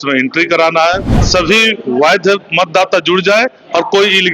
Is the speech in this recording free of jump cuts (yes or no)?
no